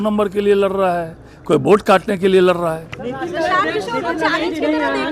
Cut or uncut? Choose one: uncut